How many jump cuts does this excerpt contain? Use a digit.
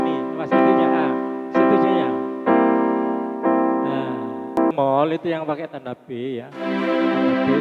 1